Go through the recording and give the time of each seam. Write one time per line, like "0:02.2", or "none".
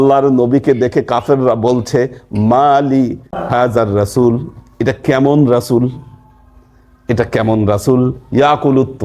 0:03.3